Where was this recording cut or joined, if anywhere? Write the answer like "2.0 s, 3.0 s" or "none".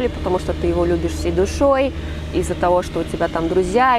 none